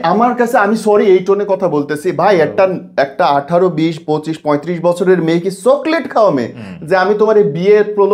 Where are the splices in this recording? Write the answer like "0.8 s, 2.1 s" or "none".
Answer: none